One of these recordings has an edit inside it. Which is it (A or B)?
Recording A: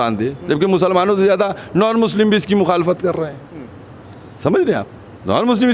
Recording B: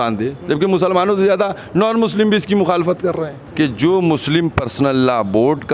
B